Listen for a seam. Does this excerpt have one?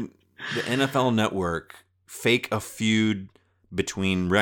yes; 1 cut; at 2.0 s

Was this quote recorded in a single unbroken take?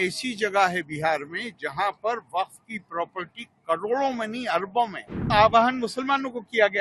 no; 1 cut; at 5.3 s

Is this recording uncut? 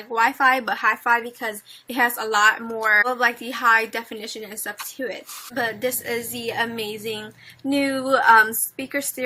no; 1 cut; at 2.5 s

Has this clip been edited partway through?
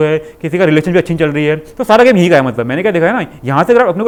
no; 0 cuts

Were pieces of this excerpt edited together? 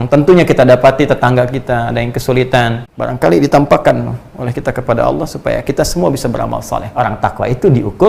yes; 2 cuts; at 2.8 s, 6.9 s

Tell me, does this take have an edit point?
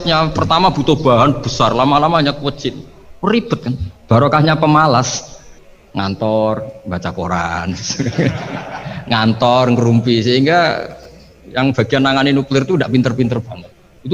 no; 0 cuts

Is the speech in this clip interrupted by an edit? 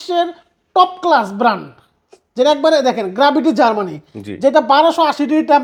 no; 0 cuts

